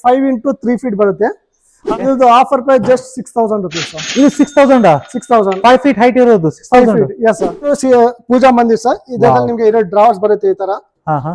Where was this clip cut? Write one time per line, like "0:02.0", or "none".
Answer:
0:01.9
0:07.7